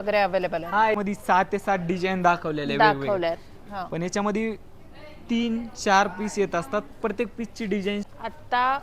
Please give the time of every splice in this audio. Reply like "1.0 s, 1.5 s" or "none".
1.0 s, 8.1 s